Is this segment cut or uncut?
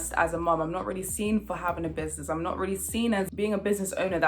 cut